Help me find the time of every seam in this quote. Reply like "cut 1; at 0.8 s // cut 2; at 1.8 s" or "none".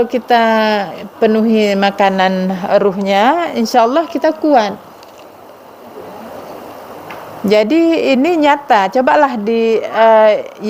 none